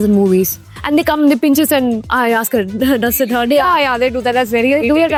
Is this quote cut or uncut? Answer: uncut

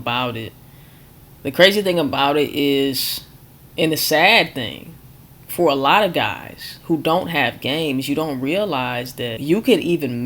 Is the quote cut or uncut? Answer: cut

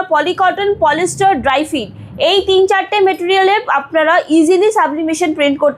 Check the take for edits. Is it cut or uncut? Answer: uncut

